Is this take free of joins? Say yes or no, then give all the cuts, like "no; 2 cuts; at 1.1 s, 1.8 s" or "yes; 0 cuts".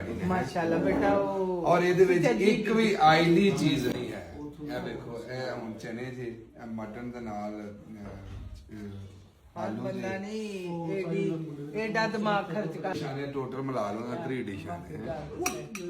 no; 1 cut; at 12.9 s